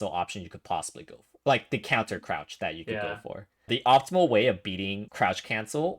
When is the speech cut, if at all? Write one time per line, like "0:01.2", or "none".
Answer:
0:03.7
0:05.1

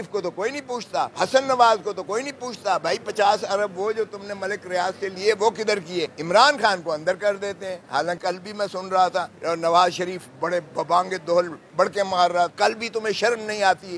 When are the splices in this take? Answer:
0:01.1
0:06.2
0:08.2
0:09.3
0:12.5

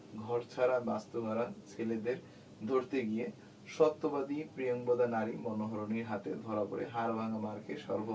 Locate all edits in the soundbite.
none

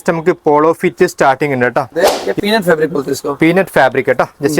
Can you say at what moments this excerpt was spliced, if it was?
0:01.9

